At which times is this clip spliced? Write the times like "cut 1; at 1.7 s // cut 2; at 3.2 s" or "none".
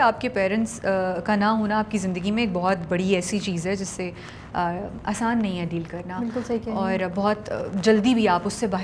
none